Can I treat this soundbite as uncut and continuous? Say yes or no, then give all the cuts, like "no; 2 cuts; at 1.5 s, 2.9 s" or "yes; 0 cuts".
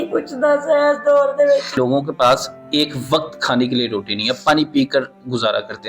no; 1 cut; at 1.7 s